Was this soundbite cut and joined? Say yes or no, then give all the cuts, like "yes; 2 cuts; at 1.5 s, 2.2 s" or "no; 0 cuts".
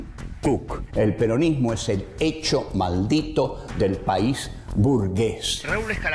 yes; 1 cut; at 3.5 s